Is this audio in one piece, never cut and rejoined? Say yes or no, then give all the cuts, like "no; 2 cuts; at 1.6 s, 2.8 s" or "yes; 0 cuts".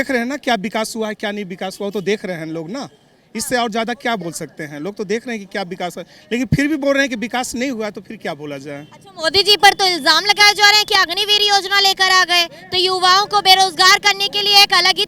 yes; 0 cuts